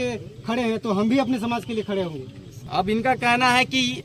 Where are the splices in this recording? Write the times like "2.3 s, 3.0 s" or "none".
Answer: 2.7 s